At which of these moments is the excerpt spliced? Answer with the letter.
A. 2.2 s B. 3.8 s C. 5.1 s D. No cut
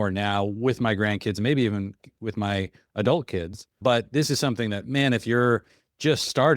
B